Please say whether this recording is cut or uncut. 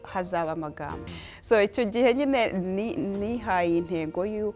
uncut